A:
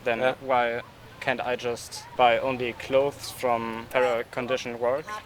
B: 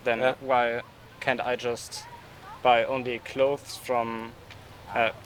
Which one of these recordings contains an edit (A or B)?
A